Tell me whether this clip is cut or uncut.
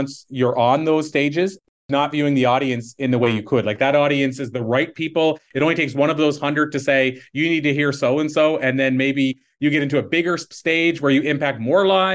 cut